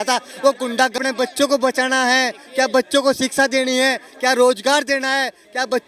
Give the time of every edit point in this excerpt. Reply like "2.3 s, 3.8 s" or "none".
0.9 s